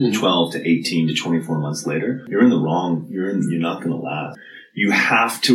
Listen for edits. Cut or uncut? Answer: cut